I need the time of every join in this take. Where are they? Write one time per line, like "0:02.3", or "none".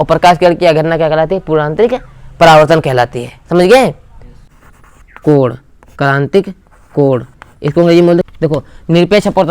0:04.4
0:08.3